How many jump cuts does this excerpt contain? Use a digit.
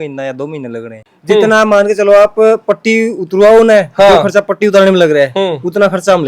1